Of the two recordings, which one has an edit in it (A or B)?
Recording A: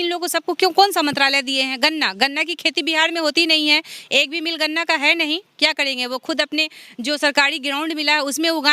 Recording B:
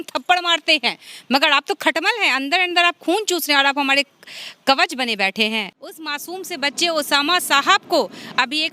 B